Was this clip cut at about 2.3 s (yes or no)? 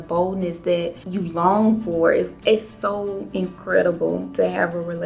yes